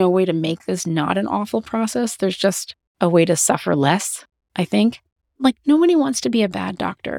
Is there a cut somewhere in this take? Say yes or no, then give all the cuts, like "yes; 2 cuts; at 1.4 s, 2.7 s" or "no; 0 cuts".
yes; 1 cut; at 5.3 s